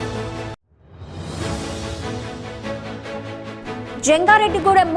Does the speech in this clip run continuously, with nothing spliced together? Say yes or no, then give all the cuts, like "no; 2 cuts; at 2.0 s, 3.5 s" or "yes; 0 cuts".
yes; 0 cuts